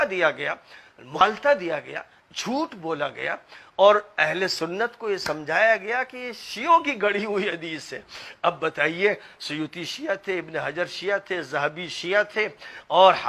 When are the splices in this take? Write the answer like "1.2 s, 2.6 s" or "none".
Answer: 1.1 s